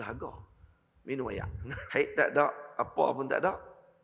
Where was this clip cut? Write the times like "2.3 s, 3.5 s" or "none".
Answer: 1.8 s